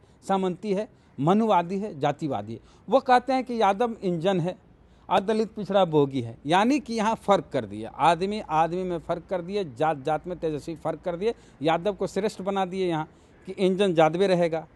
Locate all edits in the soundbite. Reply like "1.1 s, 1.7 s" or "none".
none